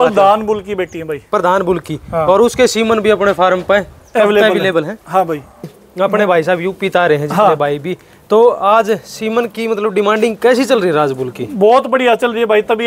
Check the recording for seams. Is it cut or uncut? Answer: cut